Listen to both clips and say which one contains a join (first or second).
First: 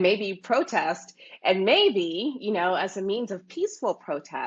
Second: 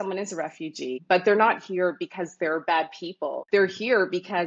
second